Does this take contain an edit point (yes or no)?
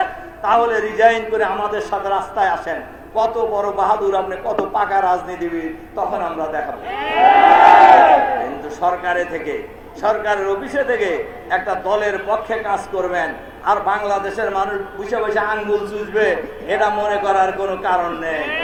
no